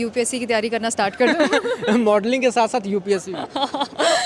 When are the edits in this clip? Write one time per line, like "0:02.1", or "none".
none